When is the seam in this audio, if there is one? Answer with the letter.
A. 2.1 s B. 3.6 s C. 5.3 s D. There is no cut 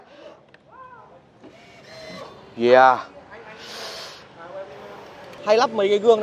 C